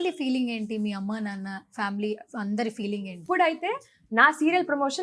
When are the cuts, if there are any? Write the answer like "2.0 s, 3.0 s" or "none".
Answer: 3.2 s